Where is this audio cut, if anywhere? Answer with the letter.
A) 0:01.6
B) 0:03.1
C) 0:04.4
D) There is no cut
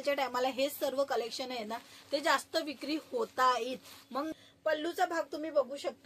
C